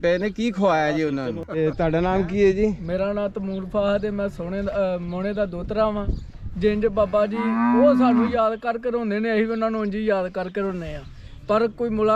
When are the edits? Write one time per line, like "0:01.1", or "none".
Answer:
0:01.5